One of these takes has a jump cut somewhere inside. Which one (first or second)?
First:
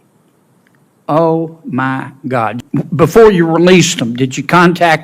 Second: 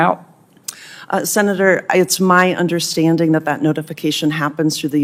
first